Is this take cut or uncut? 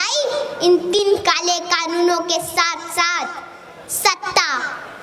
cut